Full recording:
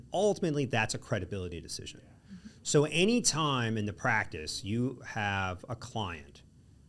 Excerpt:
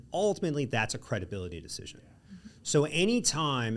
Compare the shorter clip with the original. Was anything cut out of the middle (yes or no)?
no